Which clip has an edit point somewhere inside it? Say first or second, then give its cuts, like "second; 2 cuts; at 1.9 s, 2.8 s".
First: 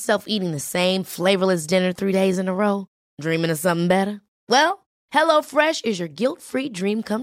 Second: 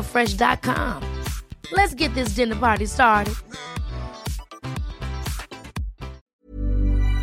second; 1 cut; at 6.2 s